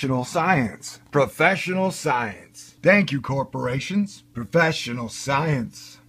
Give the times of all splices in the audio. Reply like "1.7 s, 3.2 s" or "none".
none